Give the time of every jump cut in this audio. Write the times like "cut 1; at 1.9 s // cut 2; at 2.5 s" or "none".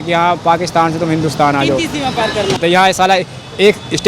cut 1; at 2.6 s